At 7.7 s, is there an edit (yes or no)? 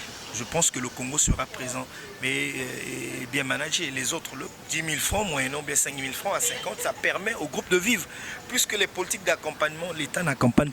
no